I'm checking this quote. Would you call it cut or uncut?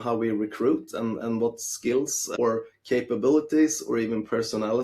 cut